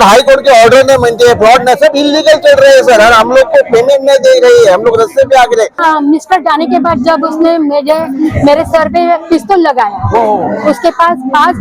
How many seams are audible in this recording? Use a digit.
1